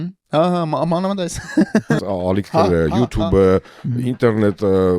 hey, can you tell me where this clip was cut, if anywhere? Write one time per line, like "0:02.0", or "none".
0:02.0